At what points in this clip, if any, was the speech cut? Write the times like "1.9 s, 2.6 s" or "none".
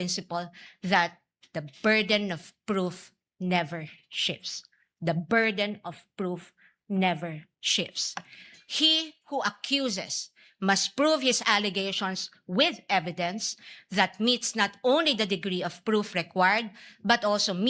none